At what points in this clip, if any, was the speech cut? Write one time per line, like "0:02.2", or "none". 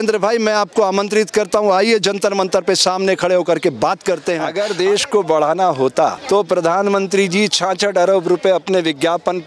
0:04.5
0:06.2